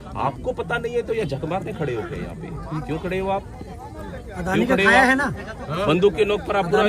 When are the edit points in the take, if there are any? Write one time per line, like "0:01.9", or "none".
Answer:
none